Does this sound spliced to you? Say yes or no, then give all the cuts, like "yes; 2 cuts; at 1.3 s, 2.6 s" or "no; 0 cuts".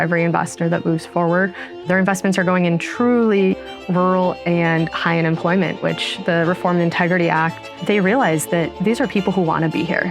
yes; 2 cuts; at 1.8 s, 7.7 s